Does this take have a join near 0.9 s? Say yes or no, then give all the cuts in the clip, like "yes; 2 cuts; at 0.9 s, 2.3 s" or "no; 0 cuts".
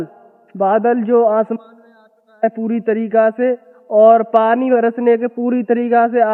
no; 0 cuts